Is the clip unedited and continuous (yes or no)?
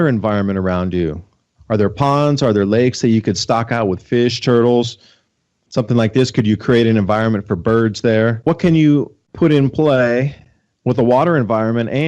no